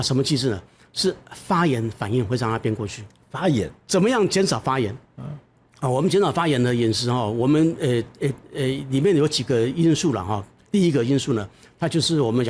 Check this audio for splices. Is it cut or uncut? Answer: cut